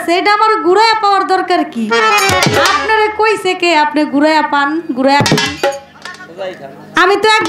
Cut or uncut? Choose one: uncut